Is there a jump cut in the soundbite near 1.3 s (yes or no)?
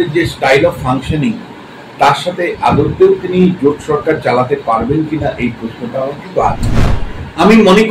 no